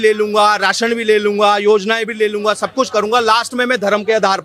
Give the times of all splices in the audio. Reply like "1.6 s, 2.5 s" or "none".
none